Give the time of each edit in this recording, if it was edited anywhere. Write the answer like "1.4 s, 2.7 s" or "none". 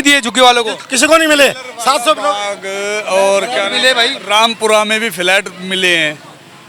none